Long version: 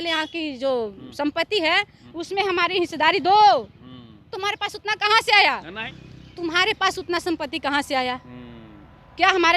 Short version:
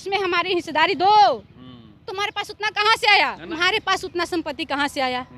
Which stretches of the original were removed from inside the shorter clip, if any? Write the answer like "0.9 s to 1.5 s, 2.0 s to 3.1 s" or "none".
5.7 s to 6.4 s

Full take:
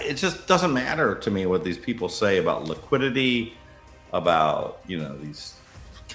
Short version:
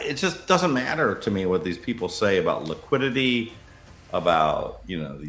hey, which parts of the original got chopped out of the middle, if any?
none

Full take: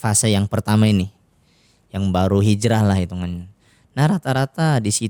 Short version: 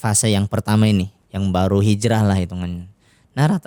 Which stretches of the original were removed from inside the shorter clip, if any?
1.2 s to 1.8 s

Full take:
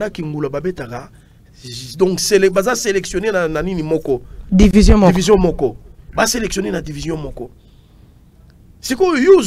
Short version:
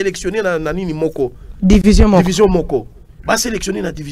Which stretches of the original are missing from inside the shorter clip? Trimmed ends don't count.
none

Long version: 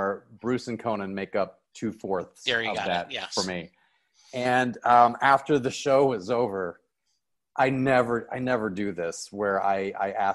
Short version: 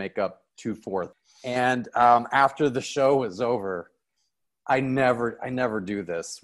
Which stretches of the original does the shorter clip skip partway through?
2.4 s to 4.1 s

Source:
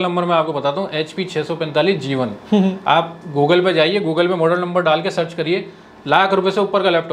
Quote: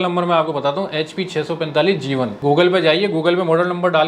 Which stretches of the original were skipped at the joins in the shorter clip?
2.3 s to 3.3 s

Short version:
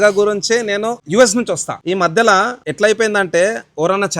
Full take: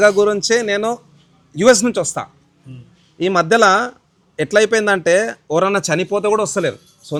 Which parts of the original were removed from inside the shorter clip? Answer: 1.0 s to 1.5 s, 2.2 s to 3.1 s, 4.0 s to 4.3 s

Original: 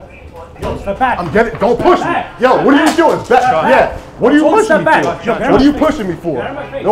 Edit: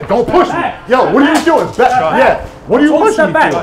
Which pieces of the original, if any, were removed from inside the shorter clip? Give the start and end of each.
none

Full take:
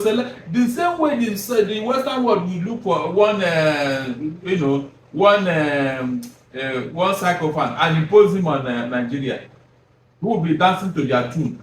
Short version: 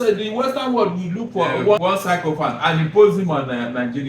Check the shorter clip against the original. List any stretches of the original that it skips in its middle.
3.3 s to 6.9 s

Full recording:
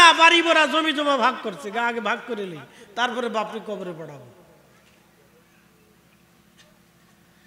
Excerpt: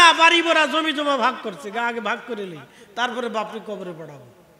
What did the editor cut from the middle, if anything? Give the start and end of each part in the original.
none

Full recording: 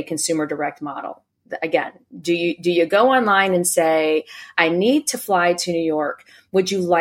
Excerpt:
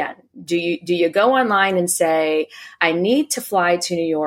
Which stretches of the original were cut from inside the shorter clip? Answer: none

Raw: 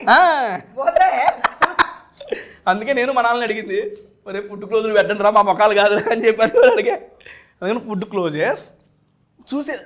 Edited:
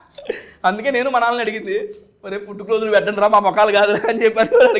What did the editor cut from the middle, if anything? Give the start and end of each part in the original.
none

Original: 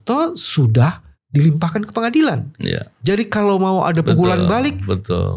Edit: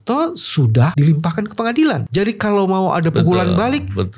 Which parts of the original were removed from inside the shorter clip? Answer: 0.9 s to 1.3 s, 2.4 s to 3.0 s

